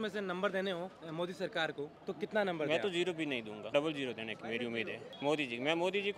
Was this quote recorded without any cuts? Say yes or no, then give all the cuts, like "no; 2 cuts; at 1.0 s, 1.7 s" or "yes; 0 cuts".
no; 4 cuts; at 1.0 s, 2.0 s, 3.6 s, 5.0 s